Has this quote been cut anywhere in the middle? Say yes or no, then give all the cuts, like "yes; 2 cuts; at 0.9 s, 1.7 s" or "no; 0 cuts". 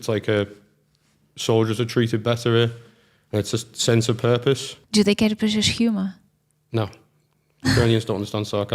yes; 1 cut; at 4.7 s